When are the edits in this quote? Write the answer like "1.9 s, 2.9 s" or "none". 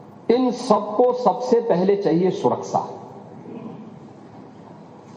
1.1 s